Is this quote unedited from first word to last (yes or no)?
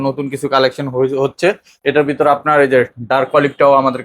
no